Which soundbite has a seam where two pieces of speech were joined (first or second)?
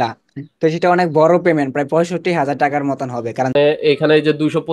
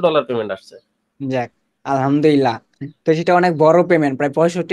first